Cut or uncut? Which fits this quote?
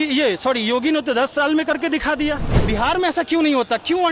cut